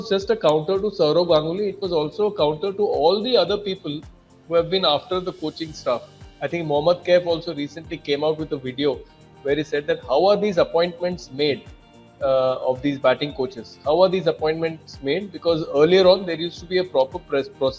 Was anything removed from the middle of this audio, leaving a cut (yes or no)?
no